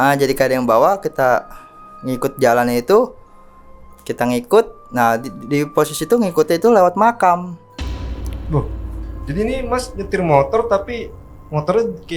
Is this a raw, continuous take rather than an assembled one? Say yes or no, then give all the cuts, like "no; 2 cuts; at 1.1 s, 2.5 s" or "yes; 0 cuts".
yes; 0 cuts